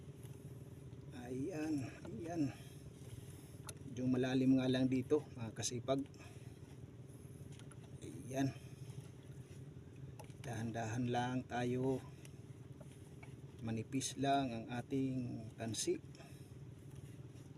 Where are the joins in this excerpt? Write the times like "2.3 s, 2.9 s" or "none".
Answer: none